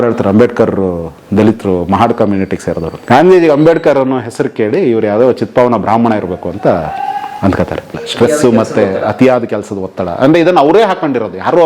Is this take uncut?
no; 2 cuts; at 2.9 s, 8.0 s

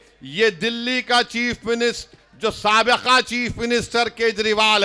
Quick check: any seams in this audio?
no; 0 cuts

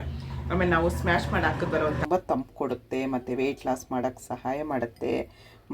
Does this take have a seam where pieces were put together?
yes; 1 cut; at 2.0 s

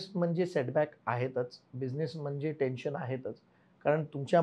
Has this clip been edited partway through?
no; 0 cuts

